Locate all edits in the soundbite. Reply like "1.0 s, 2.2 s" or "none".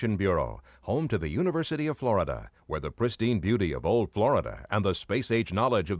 none